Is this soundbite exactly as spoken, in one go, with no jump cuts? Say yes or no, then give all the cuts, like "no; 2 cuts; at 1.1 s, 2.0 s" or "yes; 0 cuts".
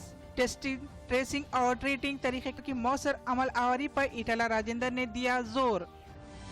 no; 1 cut; at 2.6 s